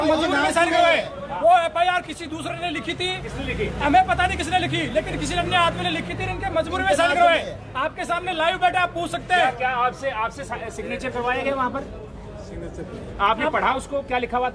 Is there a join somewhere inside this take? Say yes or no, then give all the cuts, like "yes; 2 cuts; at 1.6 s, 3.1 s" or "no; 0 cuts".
no; 0 cuts